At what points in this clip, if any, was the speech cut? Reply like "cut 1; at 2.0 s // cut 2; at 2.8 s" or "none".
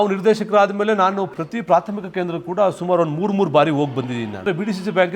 cut 1; at 1.3 s // cut 2; at 4.5 s

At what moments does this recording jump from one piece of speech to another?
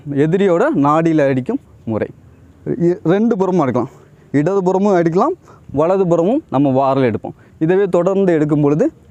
none

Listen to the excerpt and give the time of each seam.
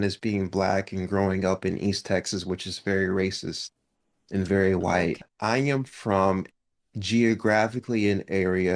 cut 1; at 5.3 s

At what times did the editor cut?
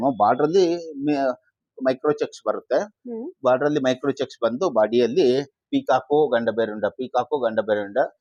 none

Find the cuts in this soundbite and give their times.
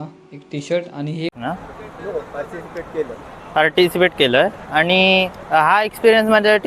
cut 1; at 1.3 s

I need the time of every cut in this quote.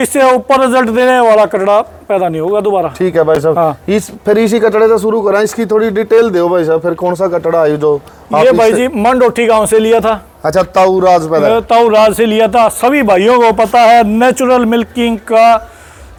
none

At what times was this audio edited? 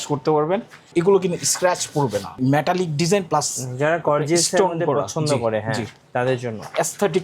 cut 1; at 0.9 s // cut 2; at 2.4 s

